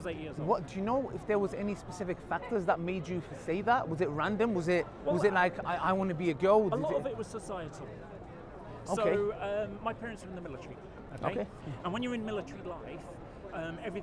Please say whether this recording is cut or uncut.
uncut